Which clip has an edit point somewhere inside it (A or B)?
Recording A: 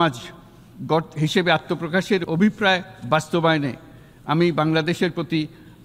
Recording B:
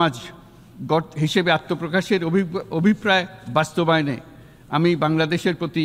A